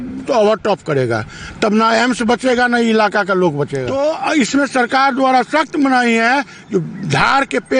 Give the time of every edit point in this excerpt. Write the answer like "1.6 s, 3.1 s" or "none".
3.8 s